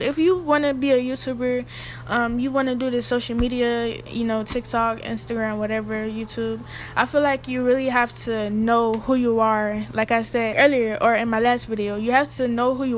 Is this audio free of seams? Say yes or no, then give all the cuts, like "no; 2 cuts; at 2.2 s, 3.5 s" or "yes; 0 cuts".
yes; 0 cuts